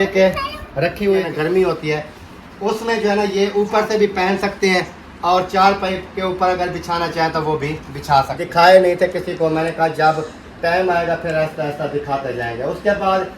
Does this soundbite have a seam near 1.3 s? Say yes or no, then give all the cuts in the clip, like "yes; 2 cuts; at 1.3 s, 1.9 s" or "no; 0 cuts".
yes; 2 cuts; at 1.3 s, 8.4 s